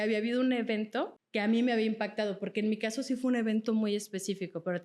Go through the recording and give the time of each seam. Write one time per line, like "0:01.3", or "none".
0:01.2